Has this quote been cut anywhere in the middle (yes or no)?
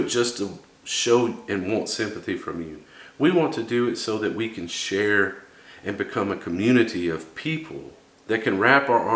no